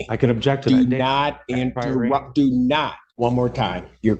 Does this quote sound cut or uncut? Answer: cut